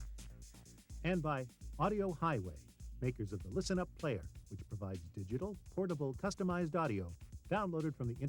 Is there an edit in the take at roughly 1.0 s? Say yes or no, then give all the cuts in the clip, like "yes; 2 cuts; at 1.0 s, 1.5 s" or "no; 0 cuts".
yes; 1 cut; at 1.0 s